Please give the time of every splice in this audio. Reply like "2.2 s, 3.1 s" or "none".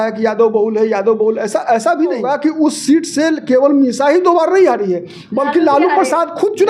2.2 s